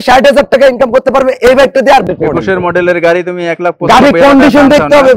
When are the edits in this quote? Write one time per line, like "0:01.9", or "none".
0:02.0